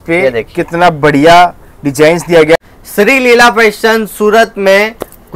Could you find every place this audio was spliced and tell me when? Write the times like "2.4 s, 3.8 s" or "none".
2.6 s